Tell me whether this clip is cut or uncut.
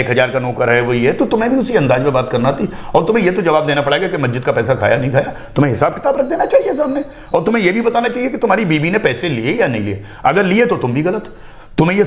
uncut